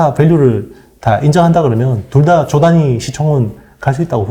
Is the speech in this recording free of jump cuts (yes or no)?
yes